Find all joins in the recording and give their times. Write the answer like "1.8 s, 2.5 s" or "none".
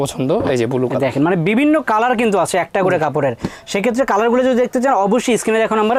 none